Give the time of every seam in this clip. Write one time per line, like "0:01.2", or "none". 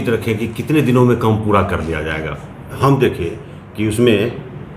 0:02.8